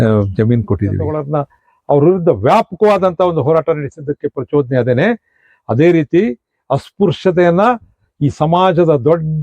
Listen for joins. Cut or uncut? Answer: cut